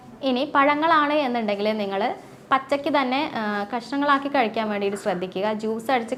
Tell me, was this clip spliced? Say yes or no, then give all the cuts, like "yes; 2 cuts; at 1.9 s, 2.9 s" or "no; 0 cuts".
no; 0 cuts